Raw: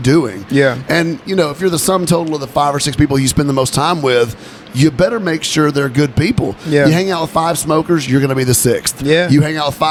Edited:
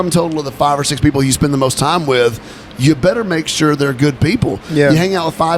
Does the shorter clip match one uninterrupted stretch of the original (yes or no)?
yes